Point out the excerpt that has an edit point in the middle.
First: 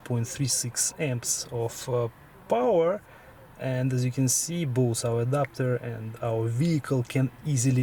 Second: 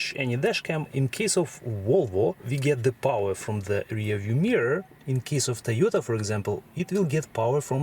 second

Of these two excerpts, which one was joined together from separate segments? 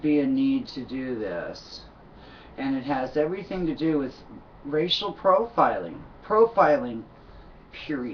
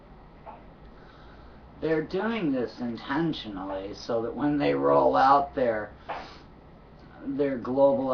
second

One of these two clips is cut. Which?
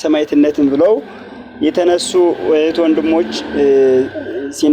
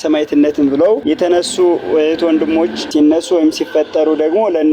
second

